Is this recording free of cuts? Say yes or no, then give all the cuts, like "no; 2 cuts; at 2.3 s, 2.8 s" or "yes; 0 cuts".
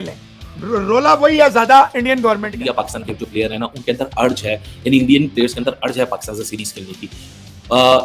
no; 1 cut; at 2.6 s